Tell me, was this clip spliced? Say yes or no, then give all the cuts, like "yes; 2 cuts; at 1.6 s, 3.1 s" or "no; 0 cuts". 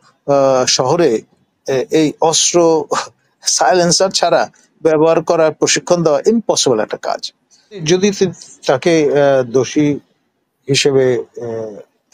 yes; 1 cut; at 7.8 s